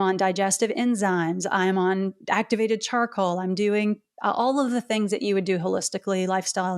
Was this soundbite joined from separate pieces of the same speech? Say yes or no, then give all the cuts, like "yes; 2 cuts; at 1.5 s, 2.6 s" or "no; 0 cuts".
no; 0 cuts